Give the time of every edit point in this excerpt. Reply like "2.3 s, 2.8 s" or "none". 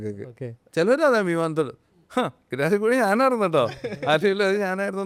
none